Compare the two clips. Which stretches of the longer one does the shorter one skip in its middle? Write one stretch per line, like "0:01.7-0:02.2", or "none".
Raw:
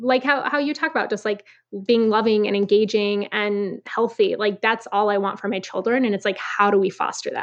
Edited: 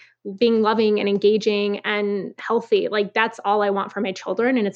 none